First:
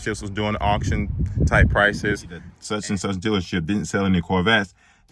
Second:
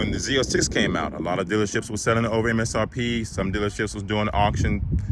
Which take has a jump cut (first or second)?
first